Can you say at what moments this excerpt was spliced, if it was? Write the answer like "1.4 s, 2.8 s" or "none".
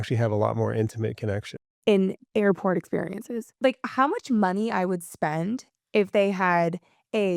1.7 s